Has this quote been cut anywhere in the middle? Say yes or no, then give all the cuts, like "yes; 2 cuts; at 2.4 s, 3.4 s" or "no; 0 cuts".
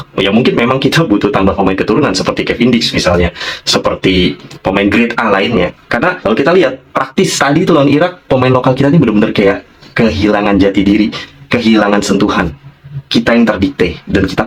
no; 0 cuts